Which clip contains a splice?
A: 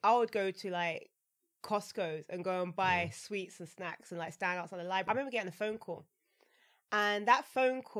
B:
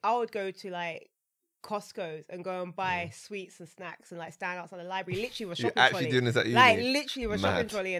A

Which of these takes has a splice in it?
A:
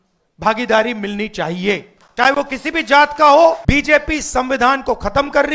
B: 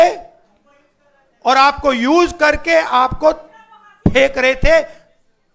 A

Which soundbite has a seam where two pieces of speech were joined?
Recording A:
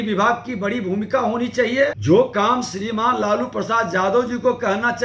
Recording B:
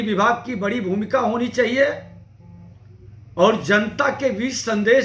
A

